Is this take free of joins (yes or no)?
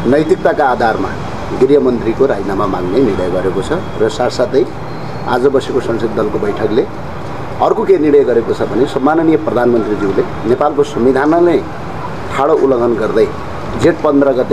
yes